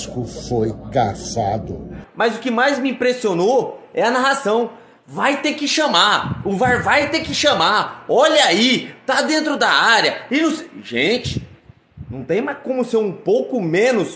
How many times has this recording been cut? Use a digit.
1